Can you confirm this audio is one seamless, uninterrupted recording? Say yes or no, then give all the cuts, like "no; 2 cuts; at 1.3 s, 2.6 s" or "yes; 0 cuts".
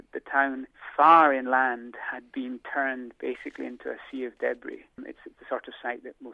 yes; 0 cuts